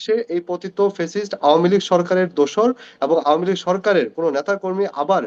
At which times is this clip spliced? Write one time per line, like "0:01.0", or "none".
none